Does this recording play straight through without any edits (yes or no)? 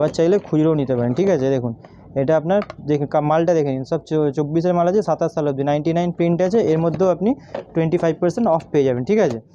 yes